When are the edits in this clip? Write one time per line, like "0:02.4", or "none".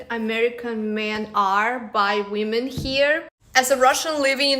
0:03.3